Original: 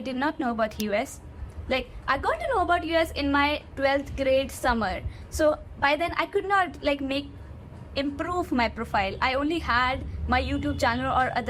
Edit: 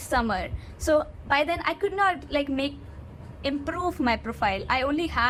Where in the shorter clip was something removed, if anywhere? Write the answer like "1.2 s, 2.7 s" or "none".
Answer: none